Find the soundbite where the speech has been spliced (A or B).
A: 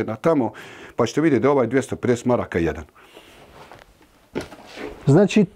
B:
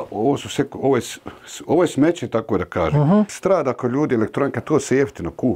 B